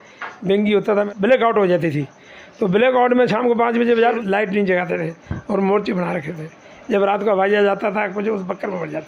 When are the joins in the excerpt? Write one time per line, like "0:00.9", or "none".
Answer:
0:01.1
0:04.1

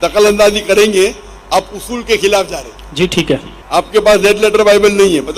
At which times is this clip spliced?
0:03.5

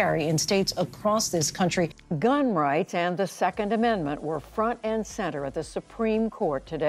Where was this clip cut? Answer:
0:01.9

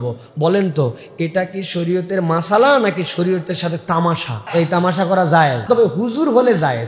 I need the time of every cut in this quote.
0:04.3
0:05.6

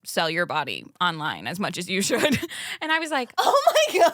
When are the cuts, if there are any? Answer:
none

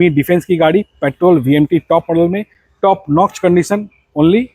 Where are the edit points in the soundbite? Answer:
none

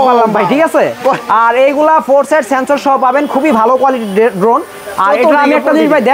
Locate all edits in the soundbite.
none

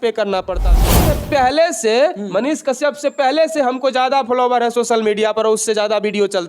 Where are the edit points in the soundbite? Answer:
0:00.9

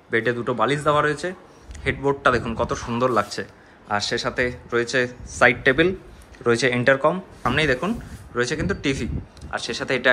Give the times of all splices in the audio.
0:07.4

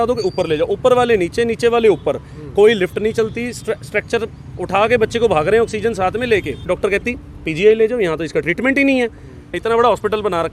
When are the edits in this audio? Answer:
0:06.6
0:09.5

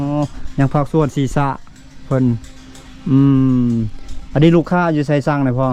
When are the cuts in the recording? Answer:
none

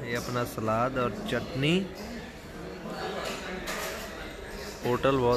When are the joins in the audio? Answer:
none

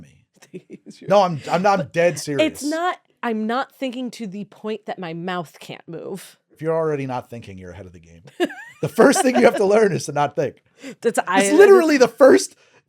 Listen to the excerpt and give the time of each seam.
0:03.1
0:06.4

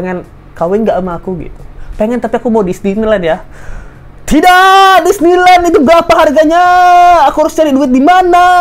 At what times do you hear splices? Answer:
none

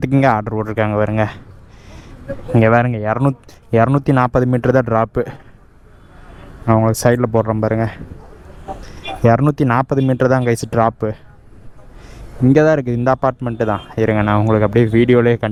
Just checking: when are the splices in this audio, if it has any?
none

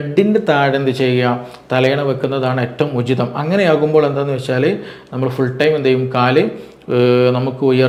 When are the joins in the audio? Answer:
none

